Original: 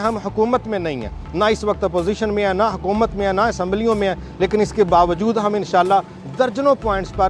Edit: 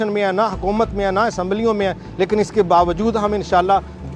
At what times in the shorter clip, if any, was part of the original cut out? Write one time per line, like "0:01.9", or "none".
none